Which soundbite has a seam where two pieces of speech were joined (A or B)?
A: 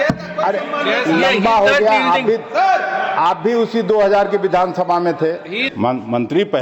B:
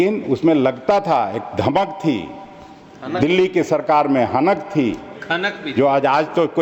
A